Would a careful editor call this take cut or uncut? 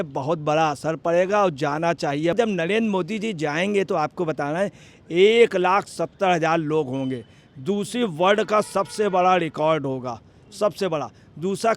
cut